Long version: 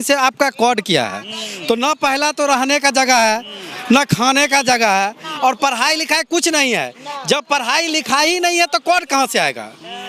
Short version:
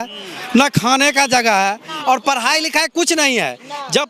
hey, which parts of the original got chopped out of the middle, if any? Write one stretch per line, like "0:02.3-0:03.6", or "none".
none